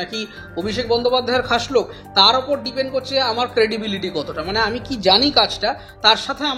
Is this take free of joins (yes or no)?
yes